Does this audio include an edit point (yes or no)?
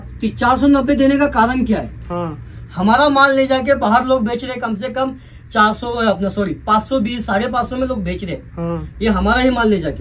no